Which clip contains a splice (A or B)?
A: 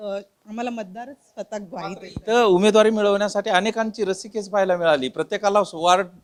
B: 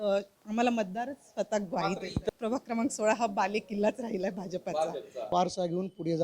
B